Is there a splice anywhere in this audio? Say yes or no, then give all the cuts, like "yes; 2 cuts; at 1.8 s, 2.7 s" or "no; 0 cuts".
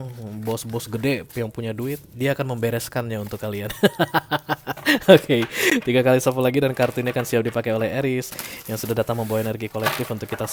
no; 0 cuts